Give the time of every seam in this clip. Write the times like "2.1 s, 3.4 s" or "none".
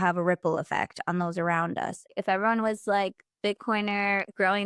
2.0 s